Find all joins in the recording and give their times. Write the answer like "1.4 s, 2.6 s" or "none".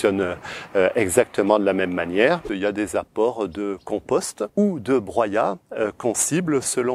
2.5 s, 4.4 s